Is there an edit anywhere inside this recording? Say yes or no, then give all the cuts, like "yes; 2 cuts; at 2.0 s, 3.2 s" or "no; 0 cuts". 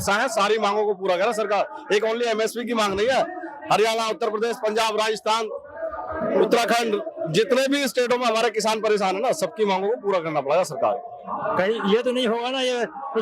no; 0 cuts